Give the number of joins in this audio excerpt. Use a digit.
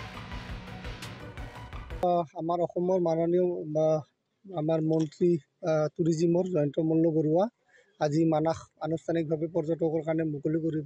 1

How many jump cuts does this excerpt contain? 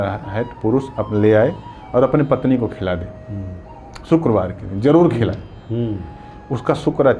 0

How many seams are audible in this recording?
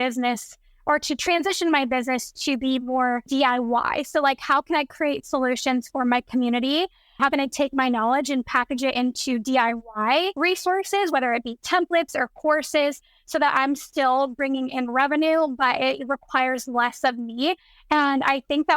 3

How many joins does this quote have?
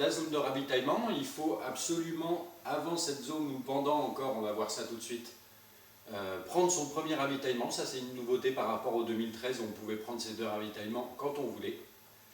1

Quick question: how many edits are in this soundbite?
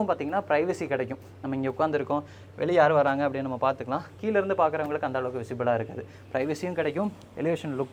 0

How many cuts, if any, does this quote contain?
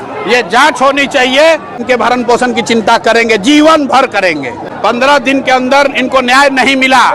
2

